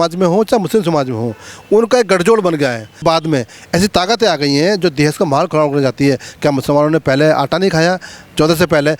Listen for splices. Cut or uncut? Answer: cut